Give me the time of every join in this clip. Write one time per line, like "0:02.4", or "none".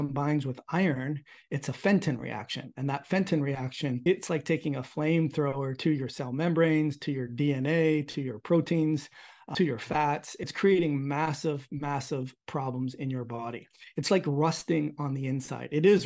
0:04.0
0:09.4
0:10.5

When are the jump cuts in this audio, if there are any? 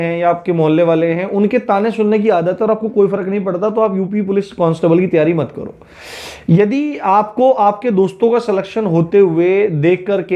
none

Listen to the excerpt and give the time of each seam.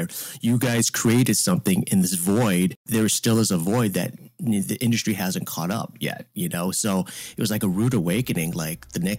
0:02.8

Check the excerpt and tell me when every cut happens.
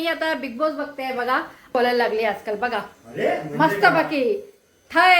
0:01.7

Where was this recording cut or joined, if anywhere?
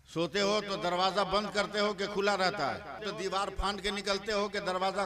0:03.0

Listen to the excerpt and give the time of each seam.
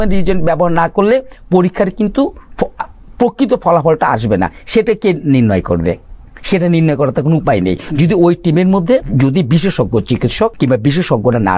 0:09.1
0:10.5

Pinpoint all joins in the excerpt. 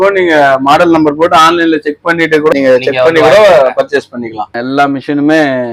0:02.5
0:04.6

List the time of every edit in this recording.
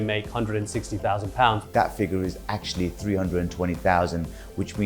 0:01.6

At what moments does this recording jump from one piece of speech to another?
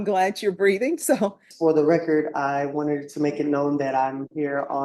0:01.5

